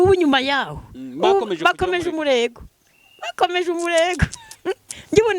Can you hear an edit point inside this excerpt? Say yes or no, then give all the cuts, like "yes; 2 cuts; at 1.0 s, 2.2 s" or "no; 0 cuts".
no; 0 cuts